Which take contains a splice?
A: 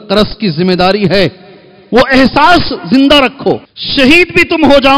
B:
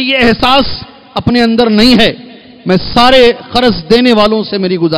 A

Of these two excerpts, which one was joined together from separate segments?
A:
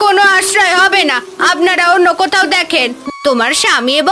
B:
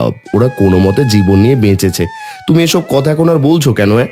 A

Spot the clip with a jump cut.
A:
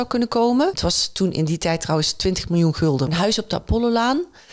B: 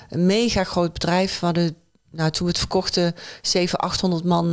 A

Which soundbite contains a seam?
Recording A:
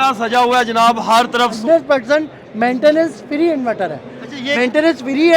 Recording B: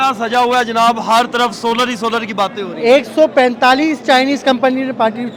A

